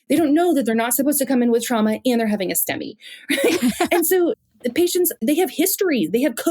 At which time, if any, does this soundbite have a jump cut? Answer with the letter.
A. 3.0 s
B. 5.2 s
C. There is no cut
B